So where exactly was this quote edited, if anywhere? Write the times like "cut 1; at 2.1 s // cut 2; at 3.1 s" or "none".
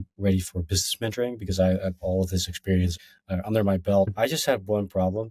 cut 1; at 3.1 s // cut 2; at 4.1 s